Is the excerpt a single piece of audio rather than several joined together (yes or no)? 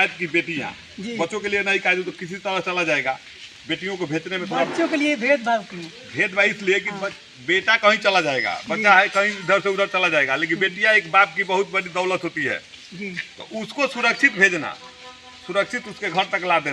yes